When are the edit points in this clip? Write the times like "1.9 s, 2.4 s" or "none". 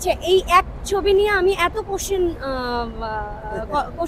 none